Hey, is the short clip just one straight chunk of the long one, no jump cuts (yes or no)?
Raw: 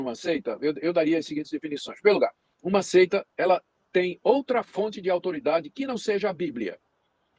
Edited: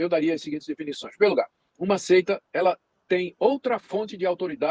yes